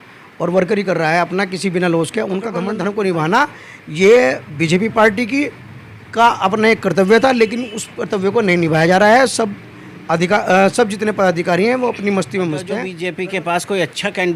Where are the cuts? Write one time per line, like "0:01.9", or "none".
0:02.7
0:12.8

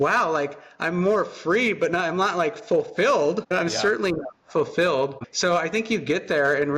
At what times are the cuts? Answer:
0:05.2

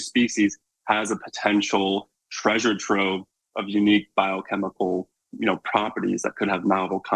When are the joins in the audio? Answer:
none

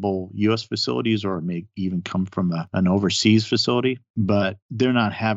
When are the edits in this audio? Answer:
0:02.7
0:04.1

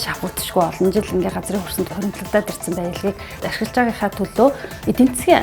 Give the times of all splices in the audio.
0:01.9
0:03.4

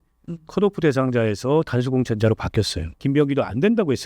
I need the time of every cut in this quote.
0:03.0

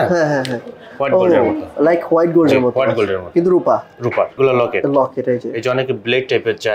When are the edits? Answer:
0:04.3

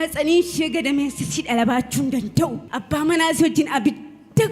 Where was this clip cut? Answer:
0:02.7

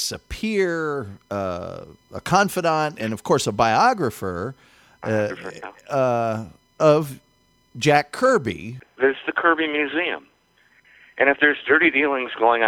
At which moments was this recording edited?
0:08.8

